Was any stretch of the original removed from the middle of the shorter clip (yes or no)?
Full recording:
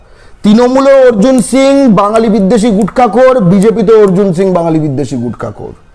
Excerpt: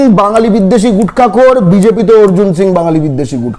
no